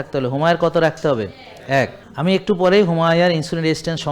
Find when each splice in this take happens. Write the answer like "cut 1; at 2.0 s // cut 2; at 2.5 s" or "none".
cut 1; at 2.0 s